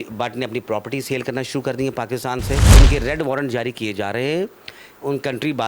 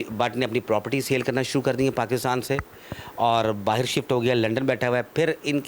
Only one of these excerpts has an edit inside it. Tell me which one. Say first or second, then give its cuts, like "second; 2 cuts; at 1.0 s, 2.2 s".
first; 1 cut; at 2.8 s